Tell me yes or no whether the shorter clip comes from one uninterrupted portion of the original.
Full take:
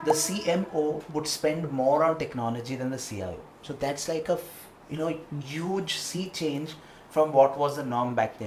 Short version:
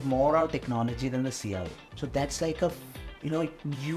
yes